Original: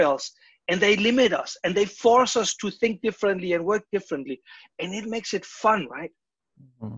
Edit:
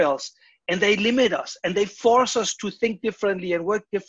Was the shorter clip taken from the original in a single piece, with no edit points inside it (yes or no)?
yes